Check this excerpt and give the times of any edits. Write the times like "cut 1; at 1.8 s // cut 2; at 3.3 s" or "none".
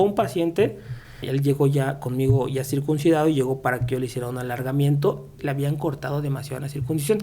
cut 1; at 1.2 s // cut 2; at 5.4 s

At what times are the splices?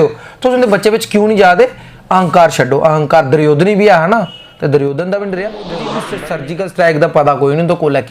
cut 1; at 6.1 s

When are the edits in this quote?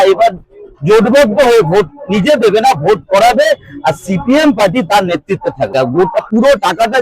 cut 1; at 5.7 s

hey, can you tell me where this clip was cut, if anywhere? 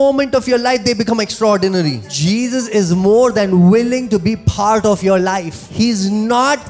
cut 1; at 2.0 s // cut 2; at 5.5 s

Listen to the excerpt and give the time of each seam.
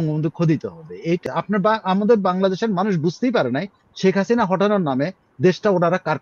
cut 1; at 1.2 s

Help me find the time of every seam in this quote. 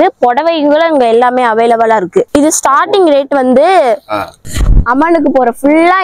cut 1; at 2.3 s // cut 2; at 4.4 s

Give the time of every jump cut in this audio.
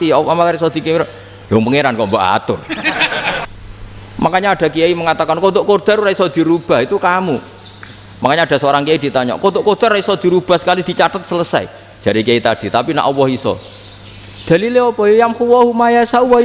cut 1; at 3.5 s

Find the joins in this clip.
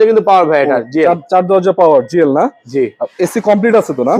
none

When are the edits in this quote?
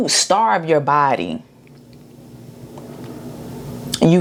none

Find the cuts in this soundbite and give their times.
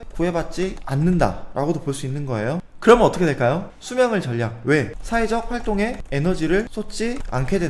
cut 1; at 2.7 s // cut 2; at 3.7 s // cut 3; at 6.7 s

